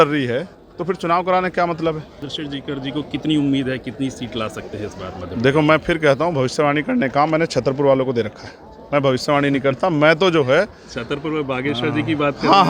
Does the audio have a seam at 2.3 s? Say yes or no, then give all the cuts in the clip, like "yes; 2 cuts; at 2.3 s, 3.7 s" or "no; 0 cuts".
yes; 1 cut; at 2.3 s